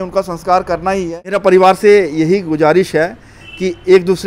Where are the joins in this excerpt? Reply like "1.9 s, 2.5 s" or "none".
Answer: 1.4 s

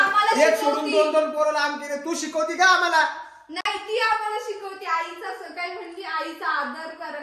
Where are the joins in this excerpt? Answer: none

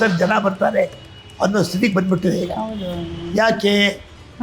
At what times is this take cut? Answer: none

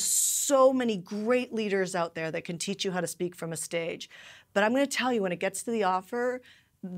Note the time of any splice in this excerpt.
none

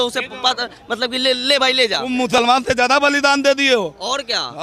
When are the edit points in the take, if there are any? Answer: 2.0 s

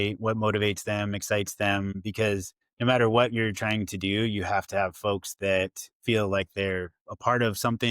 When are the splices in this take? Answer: 2.2 s

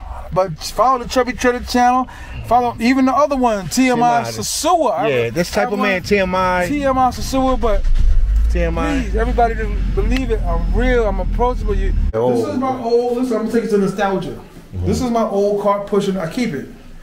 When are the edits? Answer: 12.1 s

